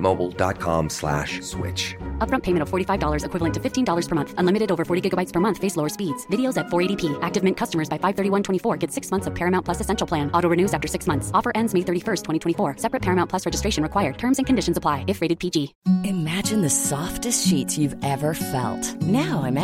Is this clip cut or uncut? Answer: cut